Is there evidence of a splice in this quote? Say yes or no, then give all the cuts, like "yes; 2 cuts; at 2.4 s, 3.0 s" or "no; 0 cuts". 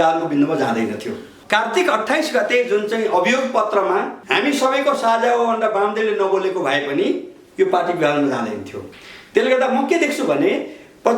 yes; 2 cuts; at 1.3 s, 4.2 s